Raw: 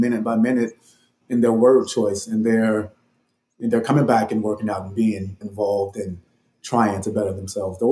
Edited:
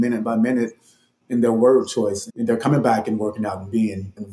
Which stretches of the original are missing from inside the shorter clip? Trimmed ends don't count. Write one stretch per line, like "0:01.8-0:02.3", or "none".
0:02.2-0:03.5